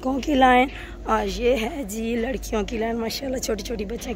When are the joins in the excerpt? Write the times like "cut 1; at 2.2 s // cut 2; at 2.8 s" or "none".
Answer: none